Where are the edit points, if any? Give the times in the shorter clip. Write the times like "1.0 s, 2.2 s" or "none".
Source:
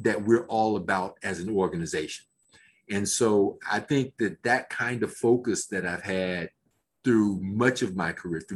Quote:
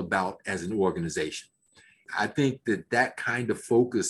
2.1 s